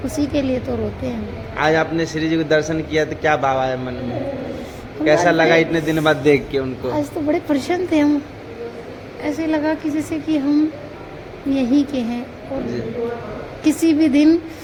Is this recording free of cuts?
yes; 0 cuts

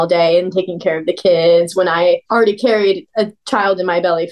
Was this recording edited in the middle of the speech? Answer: yes; 2 cuts; at 2.2 s, 3.2 s

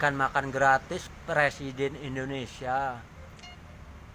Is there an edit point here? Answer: no; 0 cuts

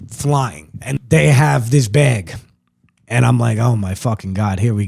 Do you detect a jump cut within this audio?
yes; 1 cut; at 1.0 s

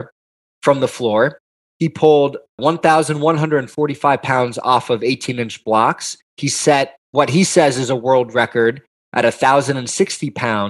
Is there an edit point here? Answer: yes; 2 cuts; at 2.6 s, 6.9 s

